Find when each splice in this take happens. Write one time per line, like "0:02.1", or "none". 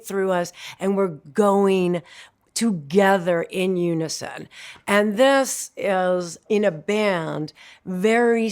0:06.4